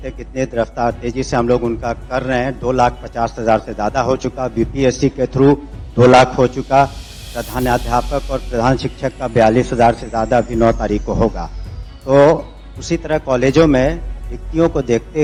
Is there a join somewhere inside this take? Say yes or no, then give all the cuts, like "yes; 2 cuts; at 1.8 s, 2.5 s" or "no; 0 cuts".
no; 0 cuts